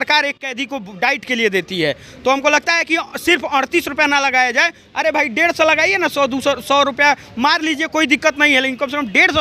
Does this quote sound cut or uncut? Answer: uncut